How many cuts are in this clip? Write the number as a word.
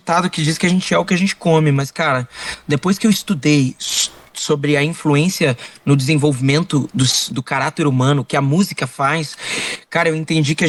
zero